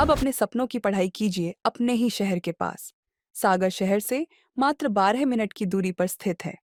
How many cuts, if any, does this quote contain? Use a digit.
0